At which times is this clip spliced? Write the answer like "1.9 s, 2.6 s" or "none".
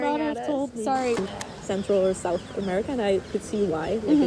1.2 s